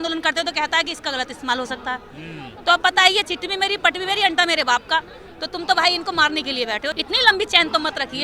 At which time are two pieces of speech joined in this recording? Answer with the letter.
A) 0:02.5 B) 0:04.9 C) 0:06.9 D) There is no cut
C